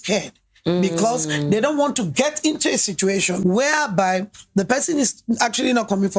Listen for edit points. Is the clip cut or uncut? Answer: cut